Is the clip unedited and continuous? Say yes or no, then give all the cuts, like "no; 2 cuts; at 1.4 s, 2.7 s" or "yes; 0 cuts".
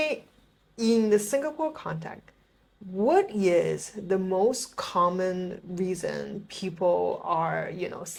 yes; 0 cuts